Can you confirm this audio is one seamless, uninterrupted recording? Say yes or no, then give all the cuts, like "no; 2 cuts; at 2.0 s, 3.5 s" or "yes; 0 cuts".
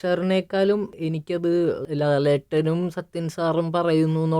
no; 2 cuts; at 0.9 s, 1.8 s